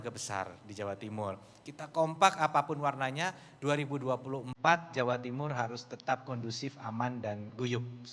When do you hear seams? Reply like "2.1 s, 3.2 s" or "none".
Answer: none

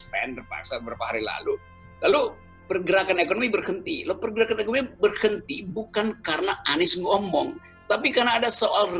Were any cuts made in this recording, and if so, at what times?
none

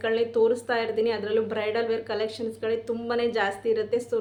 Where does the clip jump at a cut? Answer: none

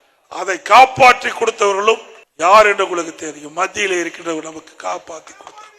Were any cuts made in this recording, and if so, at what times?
none

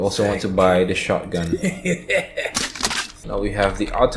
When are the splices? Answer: 3.1 s

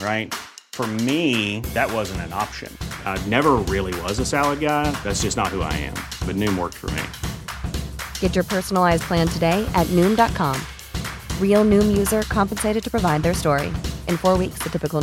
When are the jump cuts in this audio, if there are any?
none

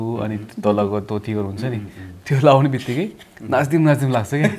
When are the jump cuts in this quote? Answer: none

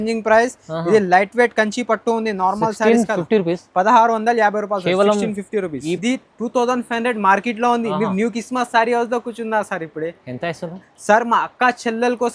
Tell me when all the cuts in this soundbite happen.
6.0 s

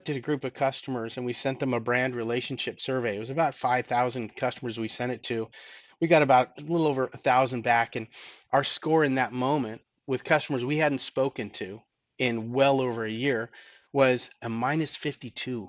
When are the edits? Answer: 6.5 s

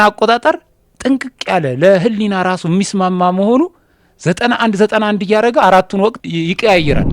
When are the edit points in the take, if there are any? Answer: 6.2 s

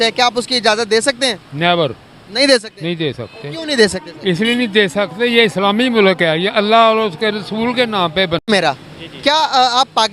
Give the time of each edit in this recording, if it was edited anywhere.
8.4 s

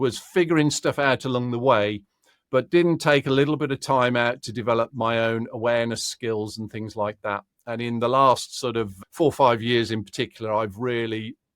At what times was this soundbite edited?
8.9 s

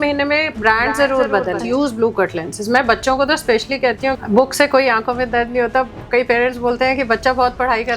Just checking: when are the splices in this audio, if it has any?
1.6 s, 4.2 s

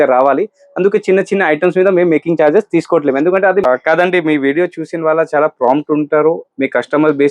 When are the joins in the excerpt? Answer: 3.6 s

